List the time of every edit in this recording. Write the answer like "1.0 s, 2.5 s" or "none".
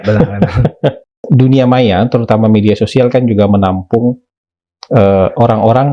1.2 s